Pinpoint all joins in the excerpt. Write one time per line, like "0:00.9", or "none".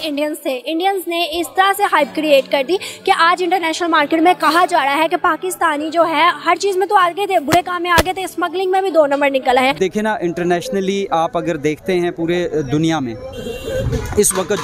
0:09.8